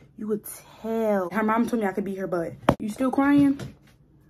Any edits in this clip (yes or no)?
yes